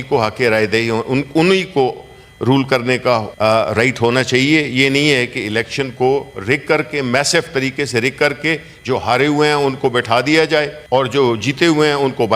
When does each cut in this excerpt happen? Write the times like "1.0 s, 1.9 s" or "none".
3.3 s, 10.8 s